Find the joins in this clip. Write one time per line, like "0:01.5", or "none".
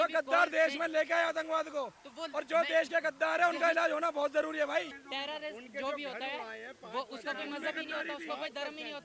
0:05.0